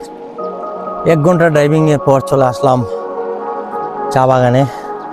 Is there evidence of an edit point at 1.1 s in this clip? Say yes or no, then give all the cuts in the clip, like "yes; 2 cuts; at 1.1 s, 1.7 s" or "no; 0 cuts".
no; 2 cuts; at 2.9 s, 4.1 s